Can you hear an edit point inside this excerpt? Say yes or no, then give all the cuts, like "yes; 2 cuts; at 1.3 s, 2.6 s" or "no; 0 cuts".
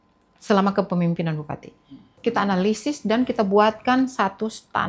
yes; 1 cut; at 2.1 s